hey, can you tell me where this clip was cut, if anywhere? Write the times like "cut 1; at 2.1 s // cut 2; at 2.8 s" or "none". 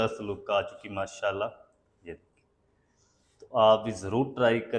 none